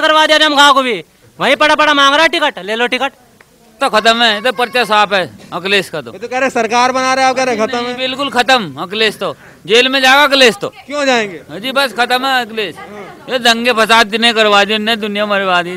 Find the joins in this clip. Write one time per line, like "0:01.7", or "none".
0:03.8